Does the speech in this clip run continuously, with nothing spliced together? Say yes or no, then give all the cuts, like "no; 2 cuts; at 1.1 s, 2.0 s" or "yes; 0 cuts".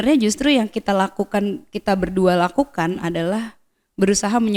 yes; 0 cuts